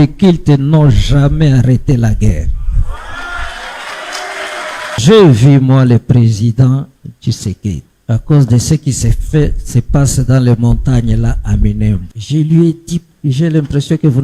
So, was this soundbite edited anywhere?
yes; 4 cuts; at 5.0 s, 7.9 s, 12.1 s, 13.1 s

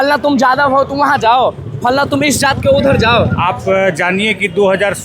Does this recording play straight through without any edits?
yes; 0 cuts

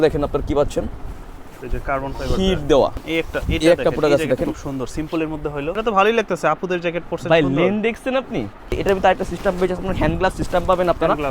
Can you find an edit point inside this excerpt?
yes; 3 cuts; at 3.0 s, 5.8 s, 8.7 s

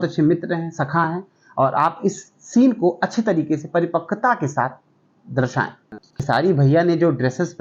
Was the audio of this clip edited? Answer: yes; 1 cut; at 5.8 s

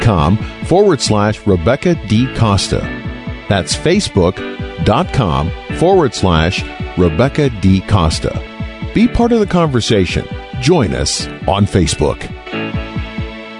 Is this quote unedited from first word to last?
no; 1 cut; at 12.3 s

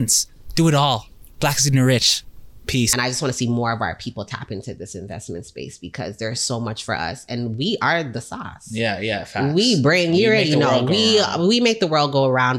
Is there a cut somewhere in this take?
yes; 1 cut; at 2.9 s

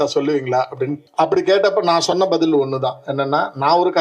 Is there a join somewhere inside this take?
yes; 1 cut; at 1.0 s

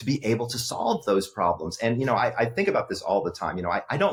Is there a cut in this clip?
no; 0 cuts

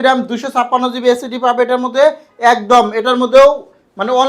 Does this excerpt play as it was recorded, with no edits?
yes; 0 cuts

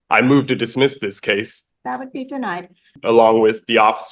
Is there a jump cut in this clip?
yes; 2 cuts; at 1.6 s, 3.0 s

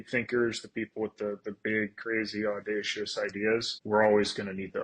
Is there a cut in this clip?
yes; 1 cut; at 3.7 s

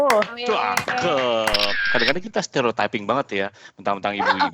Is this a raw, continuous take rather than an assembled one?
no; 1 cut; at 1.8 s

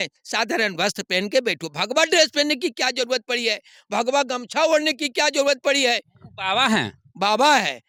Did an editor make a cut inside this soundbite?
no; 0 cuts

